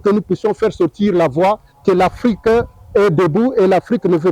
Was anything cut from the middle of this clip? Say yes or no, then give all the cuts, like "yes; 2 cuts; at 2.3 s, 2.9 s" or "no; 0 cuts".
no; 0 cuts